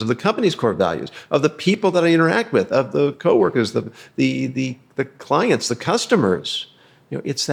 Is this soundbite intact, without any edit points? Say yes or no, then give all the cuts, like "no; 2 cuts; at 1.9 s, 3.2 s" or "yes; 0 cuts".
yes; 0 cuts